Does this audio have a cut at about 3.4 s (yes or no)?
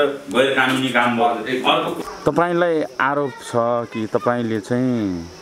no